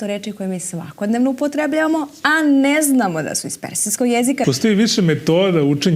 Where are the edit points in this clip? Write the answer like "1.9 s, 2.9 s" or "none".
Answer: 4.4 s